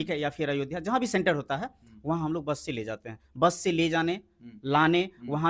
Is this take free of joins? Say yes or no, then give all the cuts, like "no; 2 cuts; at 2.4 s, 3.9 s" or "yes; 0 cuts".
yes; 0 cuts